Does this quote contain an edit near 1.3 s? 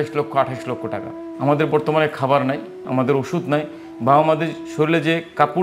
yes; 1 cut; at 1.3 s

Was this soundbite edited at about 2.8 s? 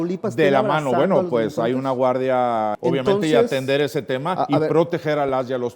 yes; 1 cut; at 2.8 s

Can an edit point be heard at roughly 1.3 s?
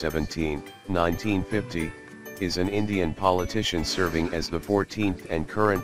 no; 0 cuts

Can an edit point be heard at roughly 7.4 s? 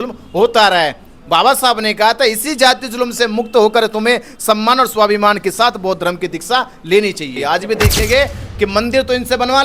yes; 1 cut; at 7.4 s

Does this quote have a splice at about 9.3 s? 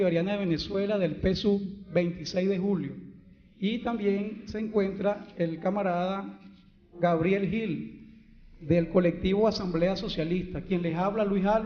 yes; 1 cut; at 9.3 s

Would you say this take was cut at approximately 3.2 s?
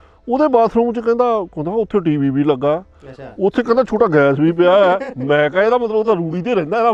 no; 0 cuts

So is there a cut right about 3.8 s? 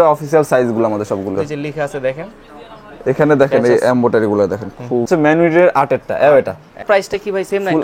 no; 3 cuts; at 1.3 s, 5.0 s, 6.8 s

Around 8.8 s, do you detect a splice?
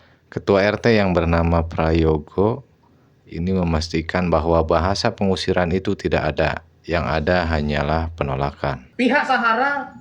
yes; 1 cut; at 8.8 s

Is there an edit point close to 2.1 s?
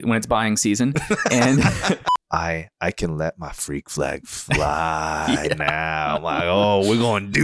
yes; 1 cut; at 2.1 s

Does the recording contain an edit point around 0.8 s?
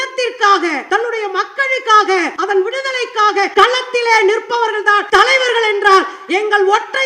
yes; 4 cuts; at 0.8 s, 2.3 s, 3.5 s, 5.0 s

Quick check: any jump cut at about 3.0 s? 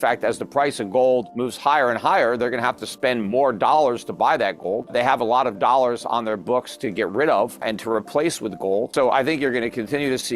no; 4 cuts; at 1.4 s, 4.9 s, 7.6 s, 8.9 s

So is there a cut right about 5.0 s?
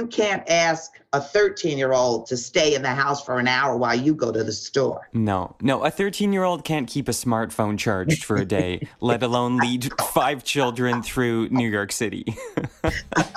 yes; 1 cut; at 5.0 s

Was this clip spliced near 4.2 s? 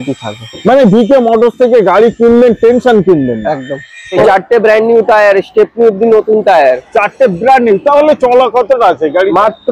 yes; 1 cut; at 4.2 s

